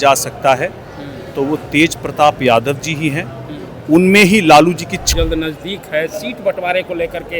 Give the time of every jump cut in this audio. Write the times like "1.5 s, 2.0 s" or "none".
5.1 s